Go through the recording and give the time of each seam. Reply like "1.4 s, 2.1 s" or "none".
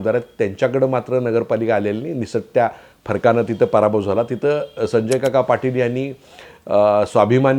none